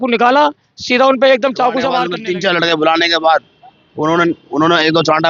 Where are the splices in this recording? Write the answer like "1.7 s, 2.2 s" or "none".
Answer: 2.1 s

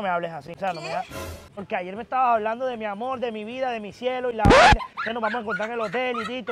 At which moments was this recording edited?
1.5 s

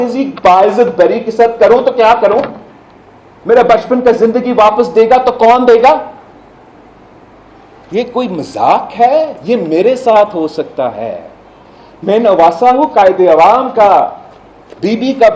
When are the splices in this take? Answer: none

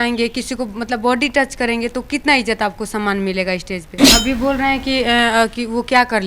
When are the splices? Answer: 4.0 s

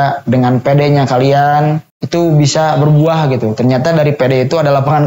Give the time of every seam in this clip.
1.9 s

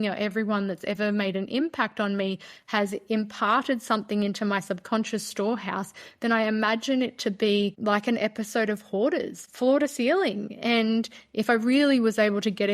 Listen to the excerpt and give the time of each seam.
7.8 s, 9.4 s

